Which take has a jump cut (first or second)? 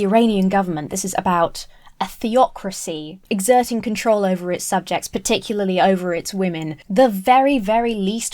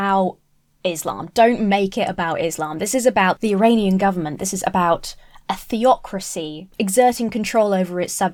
first